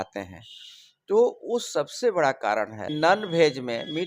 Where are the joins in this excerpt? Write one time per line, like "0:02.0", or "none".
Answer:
0:02.9